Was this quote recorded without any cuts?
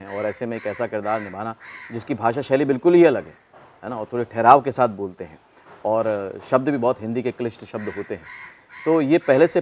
yes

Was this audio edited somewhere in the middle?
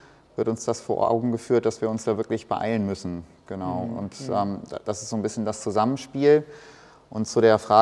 no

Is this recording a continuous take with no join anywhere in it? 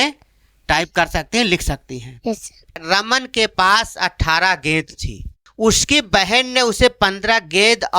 no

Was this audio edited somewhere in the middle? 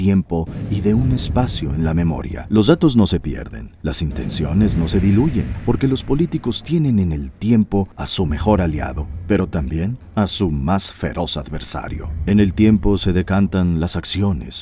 yes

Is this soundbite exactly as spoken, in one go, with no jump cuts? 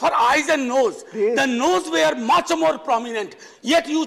yes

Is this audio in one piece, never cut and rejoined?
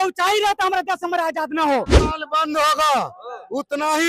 no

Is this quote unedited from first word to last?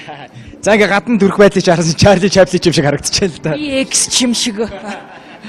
yes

